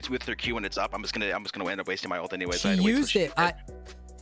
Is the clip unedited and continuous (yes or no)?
yes